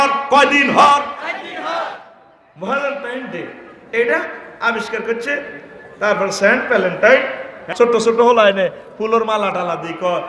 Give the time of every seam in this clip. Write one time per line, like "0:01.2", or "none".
0:07.6